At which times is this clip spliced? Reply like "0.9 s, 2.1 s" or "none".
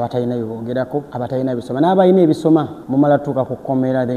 1.1 s, 2.8 s